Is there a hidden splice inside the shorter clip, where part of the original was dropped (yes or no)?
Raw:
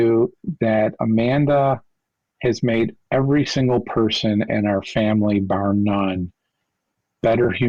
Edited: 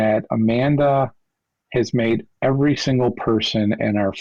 no